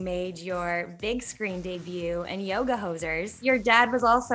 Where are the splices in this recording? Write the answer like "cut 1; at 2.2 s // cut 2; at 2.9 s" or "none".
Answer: cut 1; at 3.3 s

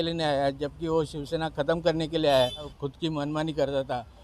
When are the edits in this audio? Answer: cut 1; at 2.7 s

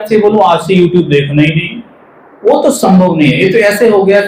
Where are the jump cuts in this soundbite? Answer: none

